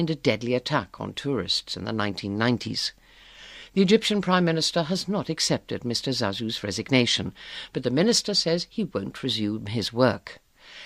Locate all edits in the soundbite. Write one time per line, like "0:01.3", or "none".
0:08.2